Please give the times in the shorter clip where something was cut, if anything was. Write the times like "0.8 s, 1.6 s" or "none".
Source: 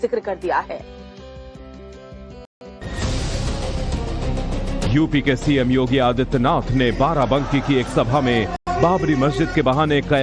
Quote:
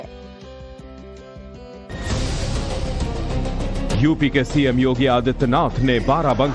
1.7 s